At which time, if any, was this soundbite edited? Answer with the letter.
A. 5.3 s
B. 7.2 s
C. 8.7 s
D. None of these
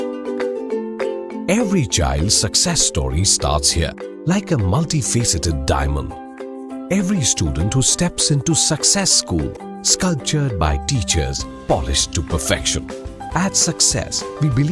D